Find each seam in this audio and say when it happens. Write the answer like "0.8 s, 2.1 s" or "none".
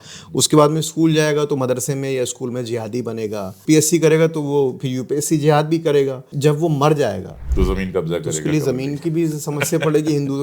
3.6 s, 6.3 s, 7.4 s